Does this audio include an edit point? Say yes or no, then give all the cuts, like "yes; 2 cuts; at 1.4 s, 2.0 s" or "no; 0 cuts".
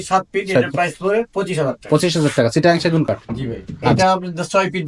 yes; 1 cut; at 4.0 s